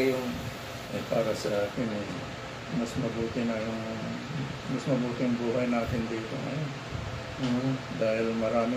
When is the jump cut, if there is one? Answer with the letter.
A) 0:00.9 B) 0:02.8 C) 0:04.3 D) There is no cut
A